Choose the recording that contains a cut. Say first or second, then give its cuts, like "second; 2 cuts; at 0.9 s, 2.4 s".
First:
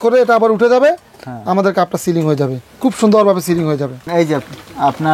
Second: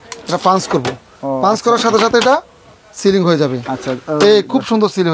first; 1 cut; at 4.0 s